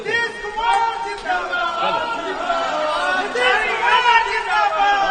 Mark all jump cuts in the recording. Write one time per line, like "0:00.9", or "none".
none